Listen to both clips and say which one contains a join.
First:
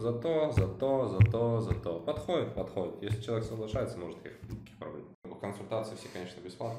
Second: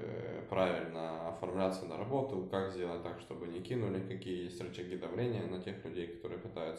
first; 1 cut; at 5.3 s

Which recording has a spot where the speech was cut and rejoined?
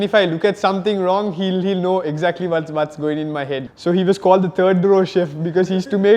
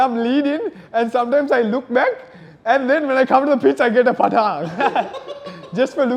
first; 1 cut; at 3.7 s

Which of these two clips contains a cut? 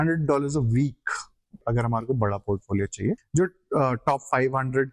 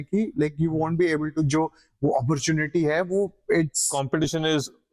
first; 2 cuts; at 1.6 s, 3.2 s

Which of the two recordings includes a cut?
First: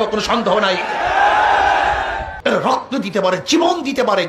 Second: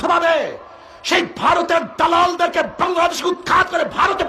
first; 1 cut; at 2.3 s

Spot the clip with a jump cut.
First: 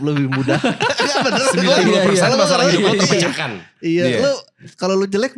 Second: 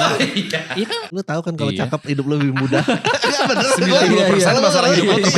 second; 1 cut; at 1.1 s

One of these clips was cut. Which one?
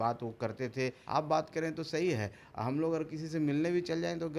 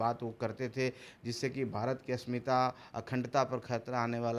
first; 1 cut; at 1.0 s

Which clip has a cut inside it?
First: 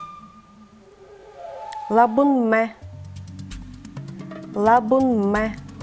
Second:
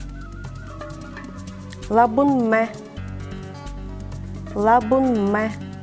first; 2 cuts; at 2.9 s, 4.5 s

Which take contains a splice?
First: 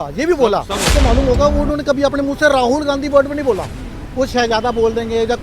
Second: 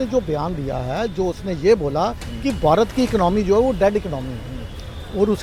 first; 1 cut; at 0.9 s

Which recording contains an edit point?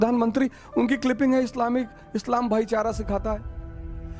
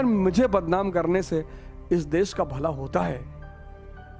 second; 1 cut; at 3.3 s

